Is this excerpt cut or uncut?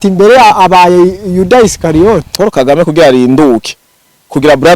cut